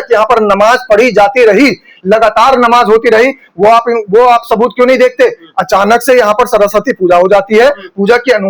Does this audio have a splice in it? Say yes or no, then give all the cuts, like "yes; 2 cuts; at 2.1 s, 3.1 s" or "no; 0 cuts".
no; 0 cuts